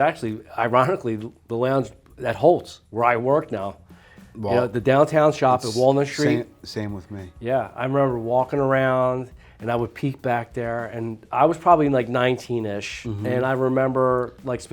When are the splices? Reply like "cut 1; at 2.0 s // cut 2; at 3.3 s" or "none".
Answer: cut 1; at 11.2 s